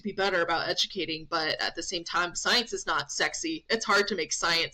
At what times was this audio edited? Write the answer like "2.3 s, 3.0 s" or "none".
none